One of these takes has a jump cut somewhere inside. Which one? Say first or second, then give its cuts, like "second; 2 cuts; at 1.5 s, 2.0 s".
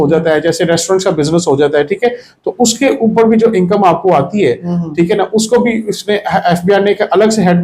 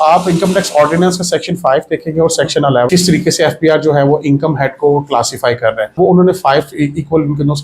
second; 2 cuts; at 2.9 s, 6.0 s